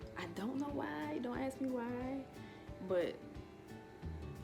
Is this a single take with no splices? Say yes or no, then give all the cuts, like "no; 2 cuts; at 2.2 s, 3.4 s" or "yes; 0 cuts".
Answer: yes; 0 cuts